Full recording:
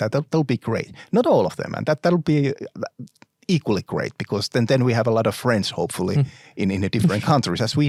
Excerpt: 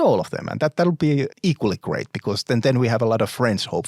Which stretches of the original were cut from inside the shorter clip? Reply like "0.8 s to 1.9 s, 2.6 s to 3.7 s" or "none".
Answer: 2.6 s to 3.4 s